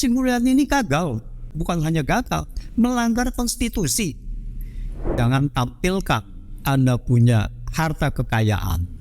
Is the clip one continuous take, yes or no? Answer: no